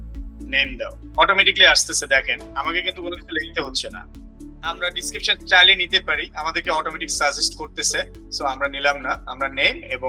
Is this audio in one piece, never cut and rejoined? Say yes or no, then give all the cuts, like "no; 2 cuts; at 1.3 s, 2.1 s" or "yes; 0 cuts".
yes; 0 cuts